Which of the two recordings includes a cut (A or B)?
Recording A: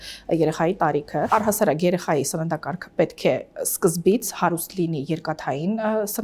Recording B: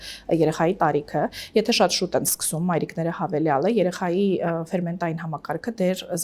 A